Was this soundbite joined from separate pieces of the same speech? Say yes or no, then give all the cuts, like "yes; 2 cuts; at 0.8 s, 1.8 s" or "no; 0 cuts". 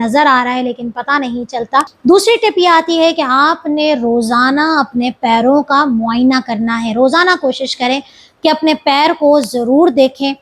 yes; 1 cut; at 1.9 s